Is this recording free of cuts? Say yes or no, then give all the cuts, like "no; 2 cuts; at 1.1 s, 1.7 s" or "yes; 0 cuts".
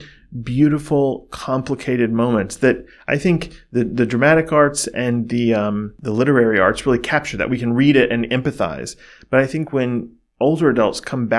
no; 1 cut; at 5.9 s